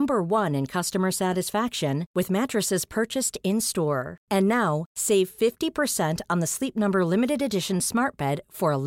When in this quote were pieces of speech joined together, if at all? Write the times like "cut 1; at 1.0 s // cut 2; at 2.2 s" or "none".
none